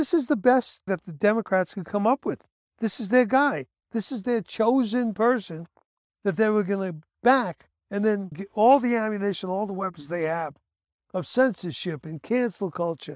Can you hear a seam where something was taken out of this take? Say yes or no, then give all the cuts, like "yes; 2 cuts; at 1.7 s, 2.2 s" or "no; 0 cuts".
yes; 2 cuts; at 1.0 s, 8.2 s